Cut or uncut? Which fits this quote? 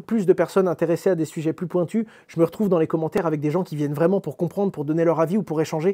uncut